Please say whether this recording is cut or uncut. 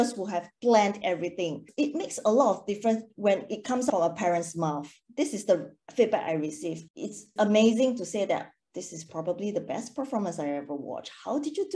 cut